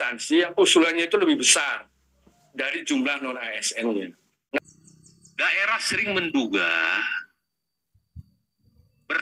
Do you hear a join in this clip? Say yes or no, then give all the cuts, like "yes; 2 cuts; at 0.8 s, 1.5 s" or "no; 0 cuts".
yes; 1 cut; at 4.6 s